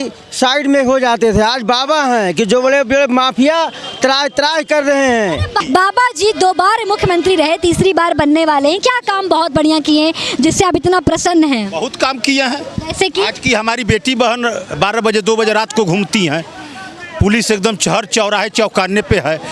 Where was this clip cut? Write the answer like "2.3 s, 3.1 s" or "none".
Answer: 5.5 s